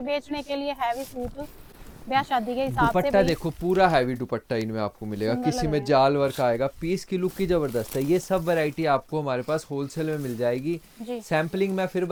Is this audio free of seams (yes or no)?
yes